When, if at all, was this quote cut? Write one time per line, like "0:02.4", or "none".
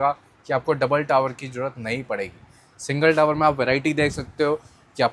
none